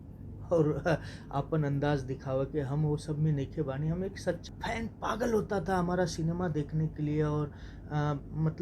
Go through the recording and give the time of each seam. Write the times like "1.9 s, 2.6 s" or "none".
4.4 s